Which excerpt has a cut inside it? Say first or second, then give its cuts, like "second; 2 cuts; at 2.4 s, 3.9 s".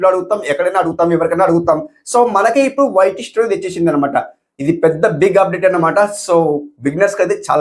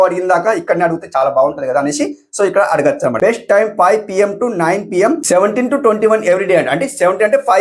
second; 1 cut; at 3.1 s